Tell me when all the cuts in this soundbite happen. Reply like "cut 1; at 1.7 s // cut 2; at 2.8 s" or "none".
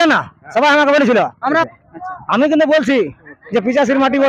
cut 1; at 1.6 s